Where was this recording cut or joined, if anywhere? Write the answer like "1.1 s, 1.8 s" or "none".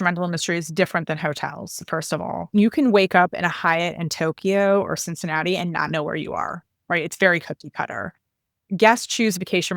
2.5 s